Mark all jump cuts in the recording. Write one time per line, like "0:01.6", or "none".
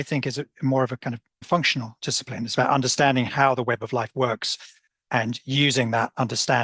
0:01.4

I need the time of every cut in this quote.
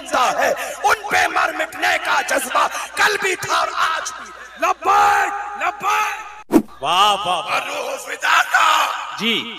0:06.4

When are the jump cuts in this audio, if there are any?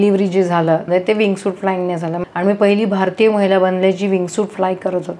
0:00.8
0:02.2

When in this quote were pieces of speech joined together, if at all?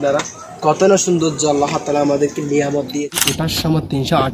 0:03.2

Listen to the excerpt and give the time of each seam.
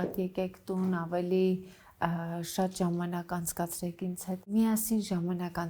0:04.5

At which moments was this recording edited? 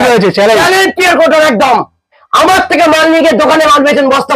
0:02.2

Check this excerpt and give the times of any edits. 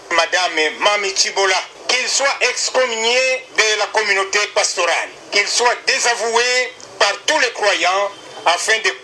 0:01.8

